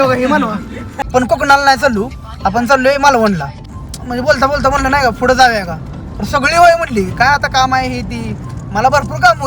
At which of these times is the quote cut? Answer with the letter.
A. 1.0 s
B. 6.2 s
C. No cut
A